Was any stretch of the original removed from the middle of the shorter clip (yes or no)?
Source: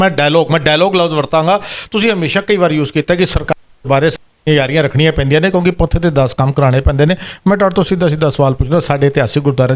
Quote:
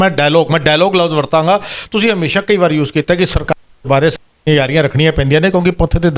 no